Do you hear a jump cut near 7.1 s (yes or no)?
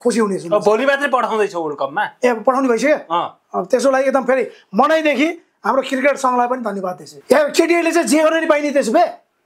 yes